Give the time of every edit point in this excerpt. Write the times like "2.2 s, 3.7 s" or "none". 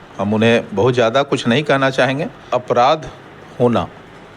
2.5 s